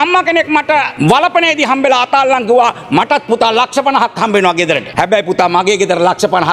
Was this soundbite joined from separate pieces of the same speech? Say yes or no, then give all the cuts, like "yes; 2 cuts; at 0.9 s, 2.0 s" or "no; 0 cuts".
yes; 2 cuts; at 0.9 s, 4.9 s